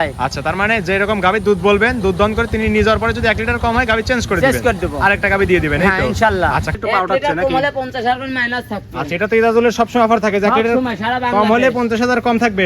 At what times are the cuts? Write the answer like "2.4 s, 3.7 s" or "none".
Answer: 6.7 s